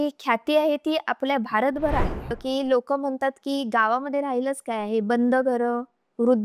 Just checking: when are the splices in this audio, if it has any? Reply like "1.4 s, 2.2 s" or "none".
2.2 s